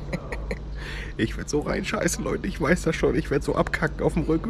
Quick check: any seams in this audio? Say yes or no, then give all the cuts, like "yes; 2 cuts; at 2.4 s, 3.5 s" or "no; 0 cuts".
no; 0 cuts